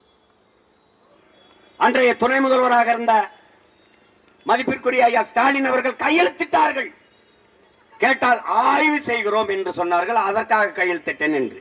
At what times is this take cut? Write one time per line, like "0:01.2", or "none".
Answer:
0:01.2